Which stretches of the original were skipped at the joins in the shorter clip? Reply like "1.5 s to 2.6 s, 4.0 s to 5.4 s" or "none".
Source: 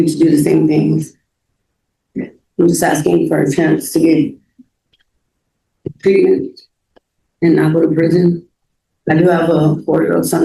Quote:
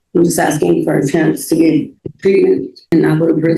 4.5 s to 5.8 s, 6.7 s to 7.5 s